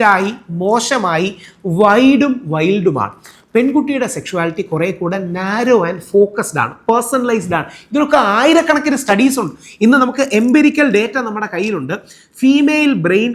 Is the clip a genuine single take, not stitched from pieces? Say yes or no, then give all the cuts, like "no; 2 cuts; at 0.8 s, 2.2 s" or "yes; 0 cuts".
yes; 0 cuts